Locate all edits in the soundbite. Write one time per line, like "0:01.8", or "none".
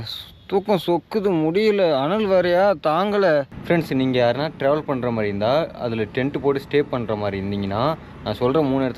0:03.6